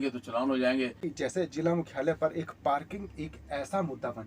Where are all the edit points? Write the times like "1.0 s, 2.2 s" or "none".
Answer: 1.0 s

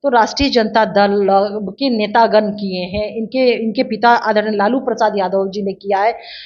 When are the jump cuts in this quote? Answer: none

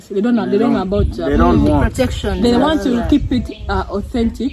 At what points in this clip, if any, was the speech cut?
none

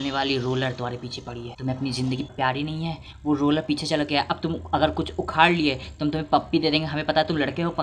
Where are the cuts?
1.5 s, 2.3 s

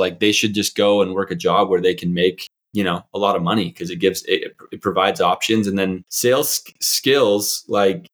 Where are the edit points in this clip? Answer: 6.1 s

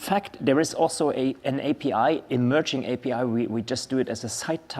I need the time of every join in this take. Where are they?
3.0 s

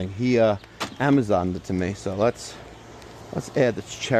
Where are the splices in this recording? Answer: none

